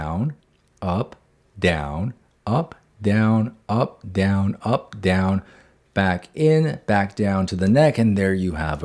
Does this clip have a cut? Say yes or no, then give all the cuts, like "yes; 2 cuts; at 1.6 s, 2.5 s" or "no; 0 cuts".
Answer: no; 0 cuts